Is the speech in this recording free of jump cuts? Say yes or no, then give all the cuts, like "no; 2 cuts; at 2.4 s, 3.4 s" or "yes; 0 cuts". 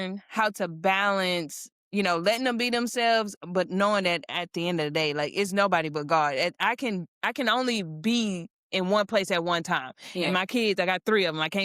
yes; 0 cuts